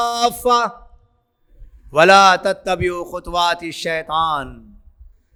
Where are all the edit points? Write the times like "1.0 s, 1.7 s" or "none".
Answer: none